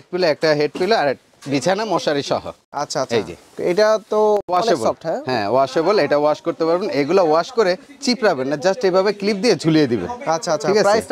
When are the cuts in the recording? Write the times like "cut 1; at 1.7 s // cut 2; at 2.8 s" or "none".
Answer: none